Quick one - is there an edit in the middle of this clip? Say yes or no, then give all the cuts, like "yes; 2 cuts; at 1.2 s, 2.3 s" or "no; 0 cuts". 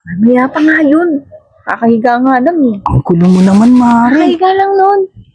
no; 0 cuts